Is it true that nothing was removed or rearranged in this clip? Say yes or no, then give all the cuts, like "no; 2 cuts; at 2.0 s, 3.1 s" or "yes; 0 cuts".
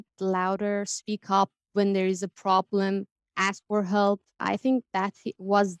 no; 1 cut; at 4.4 s